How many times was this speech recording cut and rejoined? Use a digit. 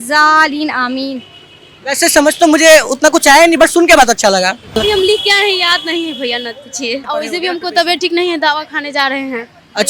2